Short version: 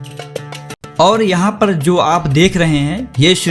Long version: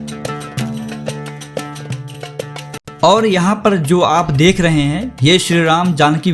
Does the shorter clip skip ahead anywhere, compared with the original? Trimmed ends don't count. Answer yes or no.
no